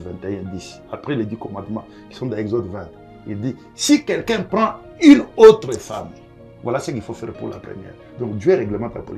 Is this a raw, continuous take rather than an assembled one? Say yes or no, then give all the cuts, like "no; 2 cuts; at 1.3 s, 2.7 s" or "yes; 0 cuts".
yes; 0 cuts